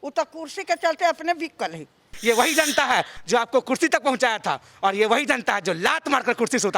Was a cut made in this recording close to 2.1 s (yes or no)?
yes